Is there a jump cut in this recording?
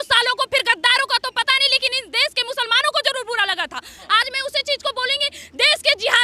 no; 0 cuts

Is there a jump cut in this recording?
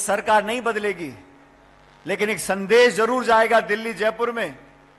no; 0 cuts

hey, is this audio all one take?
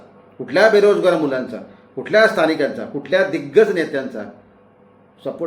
yes; 0 cuts

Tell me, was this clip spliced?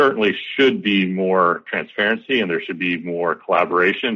no; 0 cuts

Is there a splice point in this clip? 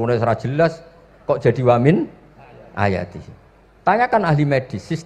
no; 0 cuts

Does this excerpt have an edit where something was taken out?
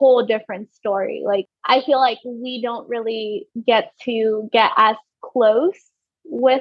yes; 1 cut; at 1.5 s

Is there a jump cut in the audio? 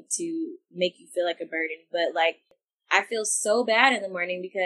yes; 1 cut; at 2.5 s

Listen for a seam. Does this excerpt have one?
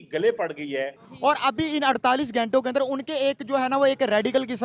yes; 1 cut; at 1.0 s

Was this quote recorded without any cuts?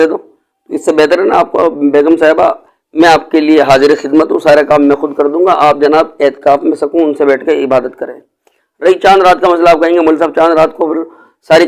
yes; 0 cuts

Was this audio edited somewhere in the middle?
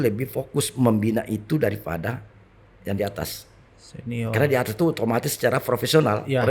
no; 0 cuts

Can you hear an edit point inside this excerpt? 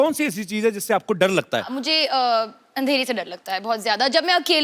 yes; 1 cut; at 1.7 s

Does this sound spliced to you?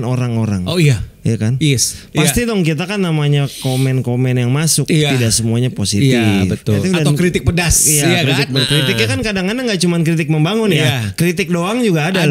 yes; 2 cuts; at 1.9 s, 6.8 s

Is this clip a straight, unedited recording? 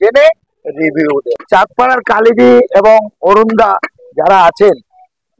no; 1 cut; at 1.3 s

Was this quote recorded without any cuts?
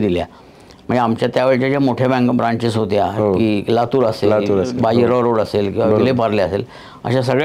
yes; 0 cuts

